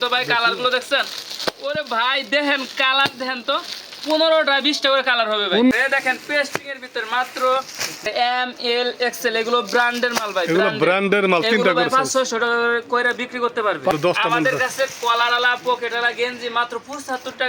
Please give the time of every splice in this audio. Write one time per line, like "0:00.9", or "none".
0:05.7
0:08.1
0:13.9